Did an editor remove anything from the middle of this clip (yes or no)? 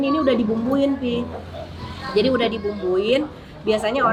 no